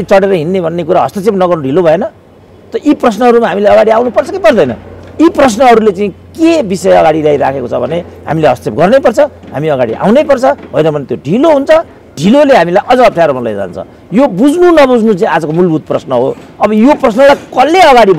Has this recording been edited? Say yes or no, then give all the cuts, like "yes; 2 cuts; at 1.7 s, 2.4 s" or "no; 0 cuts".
no; 0 cuts